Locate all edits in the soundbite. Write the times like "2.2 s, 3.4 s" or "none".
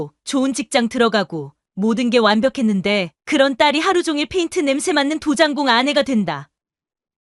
none